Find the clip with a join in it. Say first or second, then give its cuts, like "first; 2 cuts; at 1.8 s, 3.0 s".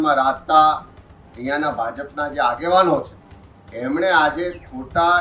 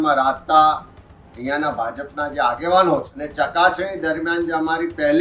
second; 1 cut; at 3.2 s